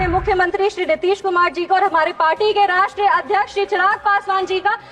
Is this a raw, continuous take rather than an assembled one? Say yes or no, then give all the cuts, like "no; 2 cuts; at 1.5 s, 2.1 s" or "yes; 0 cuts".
yes; 0 cuts